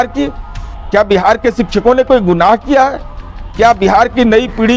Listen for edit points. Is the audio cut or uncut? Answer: uncut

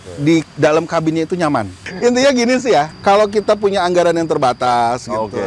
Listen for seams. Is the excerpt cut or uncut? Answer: cut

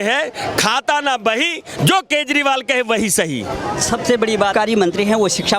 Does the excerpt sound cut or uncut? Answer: uncut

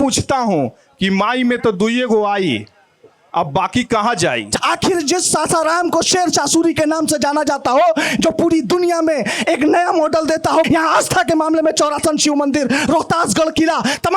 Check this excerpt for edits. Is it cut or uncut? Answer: cut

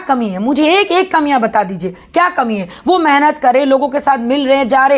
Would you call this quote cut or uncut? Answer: uncut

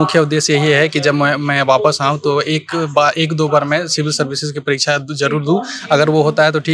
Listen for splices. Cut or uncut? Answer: uncut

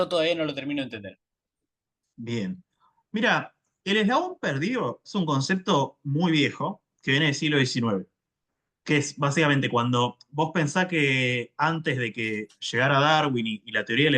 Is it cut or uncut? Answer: uncut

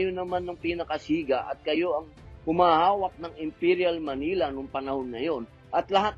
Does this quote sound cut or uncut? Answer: uncut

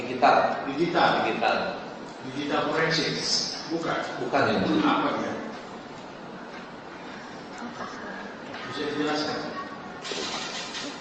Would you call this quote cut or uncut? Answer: uncut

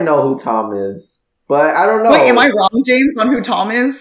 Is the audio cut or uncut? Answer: uncut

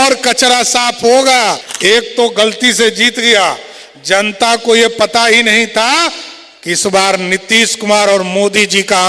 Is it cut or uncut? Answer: cut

